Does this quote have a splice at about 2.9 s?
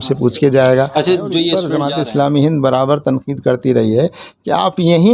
no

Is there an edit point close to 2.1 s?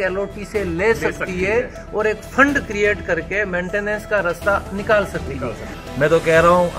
no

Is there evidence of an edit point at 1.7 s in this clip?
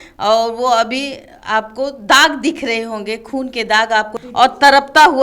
no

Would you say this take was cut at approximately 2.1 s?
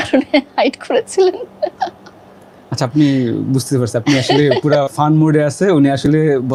no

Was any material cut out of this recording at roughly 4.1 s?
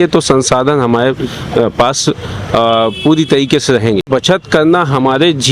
yes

